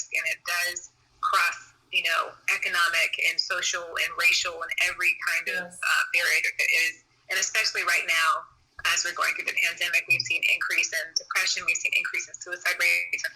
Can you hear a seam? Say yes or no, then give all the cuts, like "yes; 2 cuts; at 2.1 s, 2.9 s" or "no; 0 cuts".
no; 0 cuts